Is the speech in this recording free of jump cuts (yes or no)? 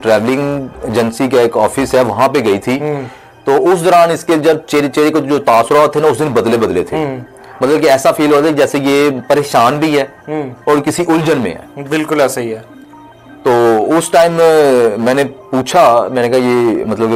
yes